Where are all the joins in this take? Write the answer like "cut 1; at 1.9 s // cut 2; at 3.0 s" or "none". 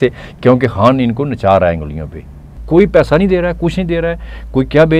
cut 1; at 2.5 s